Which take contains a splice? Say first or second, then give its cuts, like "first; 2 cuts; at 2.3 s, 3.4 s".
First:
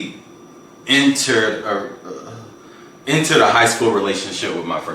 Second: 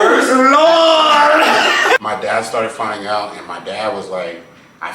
second; 1 cut; at 2.0 s